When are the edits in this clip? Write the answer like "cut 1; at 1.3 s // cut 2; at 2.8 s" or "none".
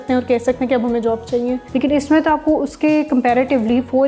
cut 1; at 1.6 s